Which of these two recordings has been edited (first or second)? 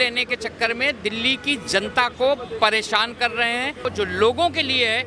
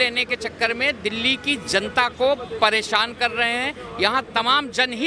first